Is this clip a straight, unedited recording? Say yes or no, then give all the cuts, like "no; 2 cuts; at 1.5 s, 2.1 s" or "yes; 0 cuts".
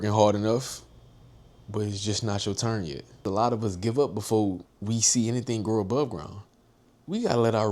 no; 2 cuts; at 3.2 s, 4.7 s